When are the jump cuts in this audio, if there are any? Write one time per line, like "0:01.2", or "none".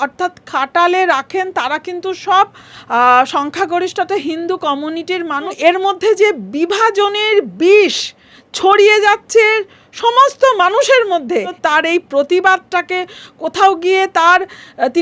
0:05.5
0:11.5

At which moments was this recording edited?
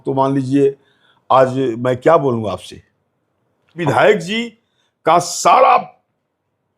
0:03.8

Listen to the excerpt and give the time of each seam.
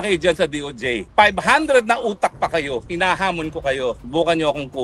none

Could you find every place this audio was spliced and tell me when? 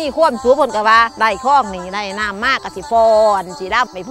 0:01.1

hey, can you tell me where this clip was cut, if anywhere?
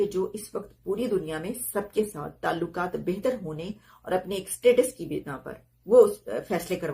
none

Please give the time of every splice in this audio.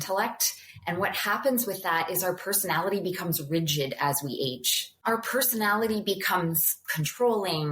0:05.0

